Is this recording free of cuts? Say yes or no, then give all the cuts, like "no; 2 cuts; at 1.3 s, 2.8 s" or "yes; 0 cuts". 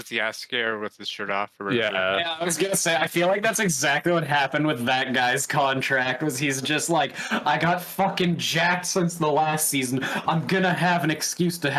yes; 0 cuts